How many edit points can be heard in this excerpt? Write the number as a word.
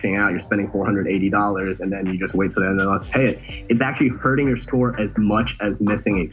zero